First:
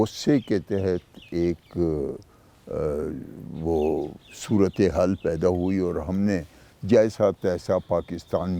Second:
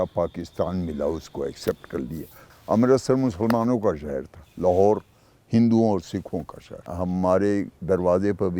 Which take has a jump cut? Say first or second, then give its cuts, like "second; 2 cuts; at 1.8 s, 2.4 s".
second; 2 cuts; at 2.5 s, 6.9 s